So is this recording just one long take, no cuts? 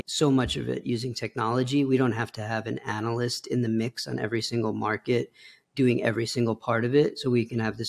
yes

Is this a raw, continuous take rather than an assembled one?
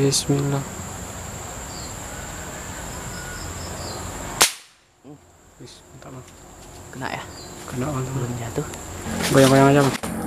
no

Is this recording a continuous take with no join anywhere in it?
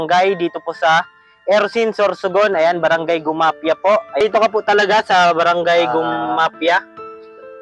no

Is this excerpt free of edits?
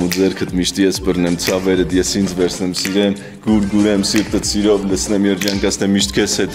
yes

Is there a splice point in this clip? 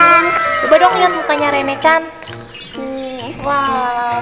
no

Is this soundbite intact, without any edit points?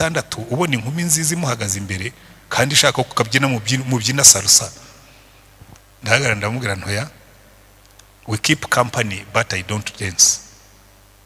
yes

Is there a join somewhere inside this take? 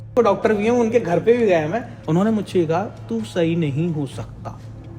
yes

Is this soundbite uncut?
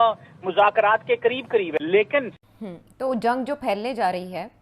no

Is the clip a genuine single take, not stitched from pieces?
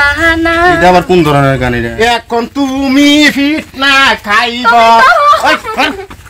no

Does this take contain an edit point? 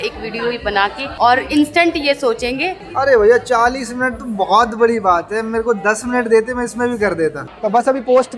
yes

